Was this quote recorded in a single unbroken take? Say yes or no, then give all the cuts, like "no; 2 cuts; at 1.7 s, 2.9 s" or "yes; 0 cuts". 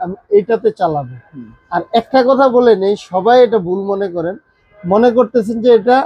yes; 0 cuts